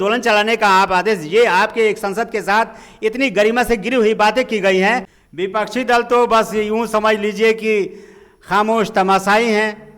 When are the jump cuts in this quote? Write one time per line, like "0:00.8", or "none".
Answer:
0:05.1